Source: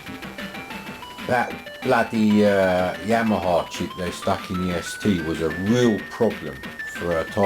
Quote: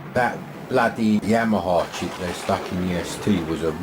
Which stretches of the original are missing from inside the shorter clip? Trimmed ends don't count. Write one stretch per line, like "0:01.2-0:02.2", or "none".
0:02.3-0:03.0